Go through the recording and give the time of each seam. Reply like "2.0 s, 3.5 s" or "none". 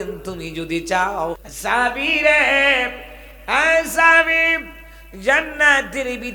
1.5 s